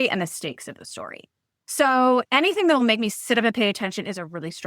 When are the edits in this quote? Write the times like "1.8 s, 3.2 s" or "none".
2.2 s